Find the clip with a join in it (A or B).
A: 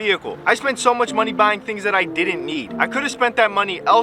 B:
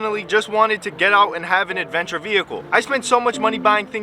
A